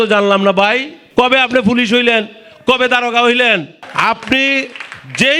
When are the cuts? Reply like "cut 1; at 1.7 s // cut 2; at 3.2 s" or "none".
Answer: cut 1; at 0.9 s // cut 2; at 3.8 s